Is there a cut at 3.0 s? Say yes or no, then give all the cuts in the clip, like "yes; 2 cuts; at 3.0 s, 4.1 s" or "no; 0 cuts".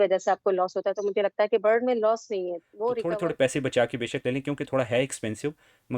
yes; 1 cut; at 3.0 s